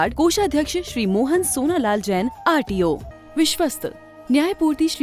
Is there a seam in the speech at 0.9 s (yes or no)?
no